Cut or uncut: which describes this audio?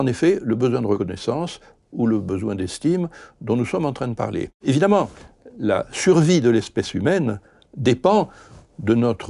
cut